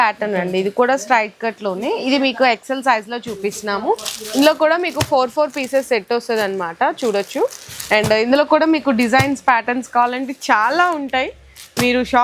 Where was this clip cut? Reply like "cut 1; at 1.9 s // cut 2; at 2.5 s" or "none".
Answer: none